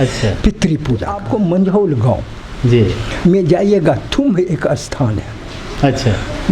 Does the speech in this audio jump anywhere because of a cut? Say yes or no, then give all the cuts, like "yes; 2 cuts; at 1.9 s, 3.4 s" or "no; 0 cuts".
yes; 1 cut; at 1.1 s